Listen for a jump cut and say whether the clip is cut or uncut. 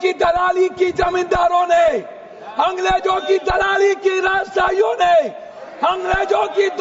uncut